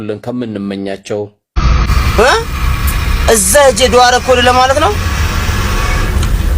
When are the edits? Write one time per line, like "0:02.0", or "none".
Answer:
0:01.4